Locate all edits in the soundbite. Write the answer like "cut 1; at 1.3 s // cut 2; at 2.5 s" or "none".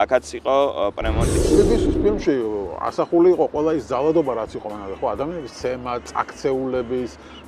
cut 1; at 1.3 s

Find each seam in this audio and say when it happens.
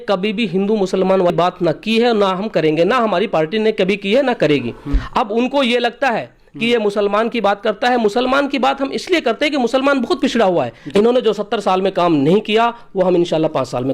cut 1; at 1.3 s // cut 2; at 5.0 s // cut 3; at 10.8 s

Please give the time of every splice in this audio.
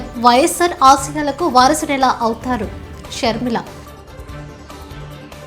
none

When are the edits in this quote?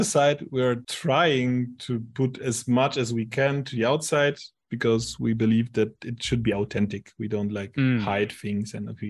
cut 1; at 0.9 s

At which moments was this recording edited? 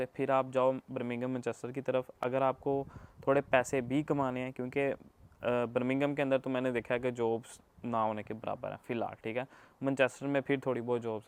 none

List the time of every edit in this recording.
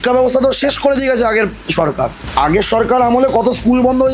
cut 1; at 2.2 s

